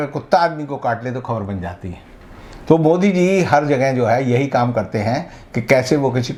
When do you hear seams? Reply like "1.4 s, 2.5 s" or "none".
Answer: none

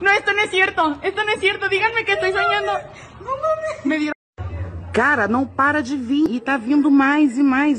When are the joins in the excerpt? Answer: 4.1 s

